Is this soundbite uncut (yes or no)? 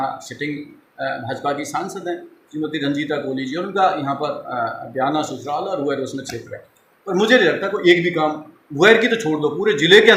yes